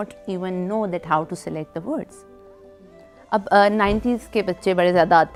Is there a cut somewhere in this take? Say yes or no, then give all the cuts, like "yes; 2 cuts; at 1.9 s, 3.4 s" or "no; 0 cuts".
no; 0 cuts